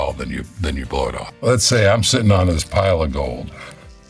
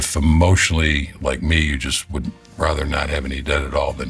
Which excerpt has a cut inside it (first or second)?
first